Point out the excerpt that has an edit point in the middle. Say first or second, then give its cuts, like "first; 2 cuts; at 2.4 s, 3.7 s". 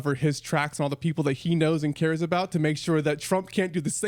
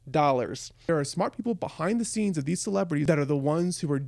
second; 2 cuts; at 0.9 s, 3.0 s